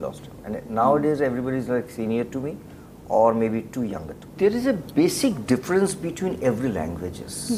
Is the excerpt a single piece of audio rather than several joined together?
no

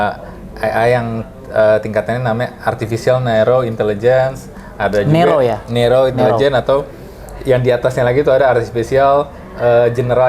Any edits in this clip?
no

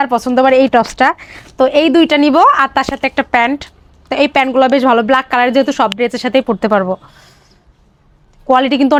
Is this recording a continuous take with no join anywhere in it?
yes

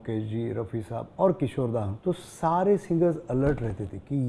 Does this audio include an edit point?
yes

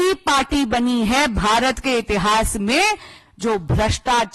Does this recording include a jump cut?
no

